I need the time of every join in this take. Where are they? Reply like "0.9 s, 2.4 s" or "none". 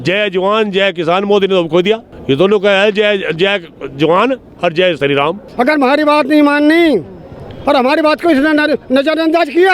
2.1 s, 5.4 s